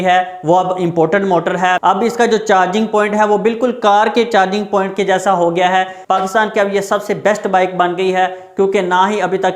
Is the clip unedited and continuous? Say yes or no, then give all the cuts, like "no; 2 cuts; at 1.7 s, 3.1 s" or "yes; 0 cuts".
no; 2 cuts; at 1.8 s, 6.0 s